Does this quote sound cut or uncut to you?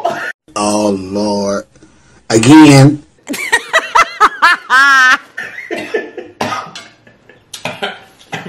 uncut